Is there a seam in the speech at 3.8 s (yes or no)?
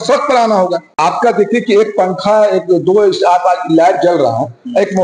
no